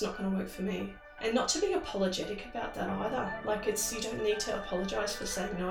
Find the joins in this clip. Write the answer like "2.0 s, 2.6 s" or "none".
1.0 s